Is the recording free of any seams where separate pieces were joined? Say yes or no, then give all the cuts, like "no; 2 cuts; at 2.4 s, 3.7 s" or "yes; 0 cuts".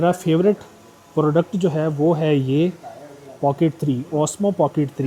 yes; 0 cuts